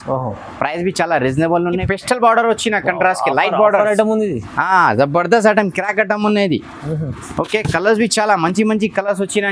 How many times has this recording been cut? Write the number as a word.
one